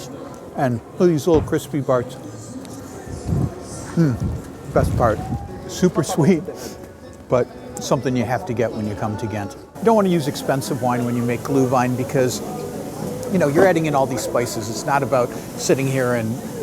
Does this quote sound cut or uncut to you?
cut